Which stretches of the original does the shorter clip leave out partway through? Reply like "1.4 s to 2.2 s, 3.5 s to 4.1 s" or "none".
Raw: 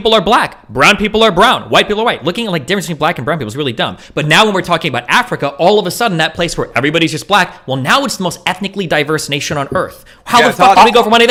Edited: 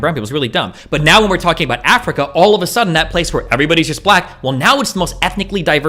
none